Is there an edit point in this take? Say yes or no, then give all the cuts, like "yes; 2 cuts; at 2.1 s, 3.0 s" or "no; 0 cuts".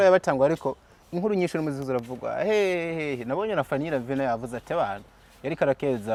no; 0 cuts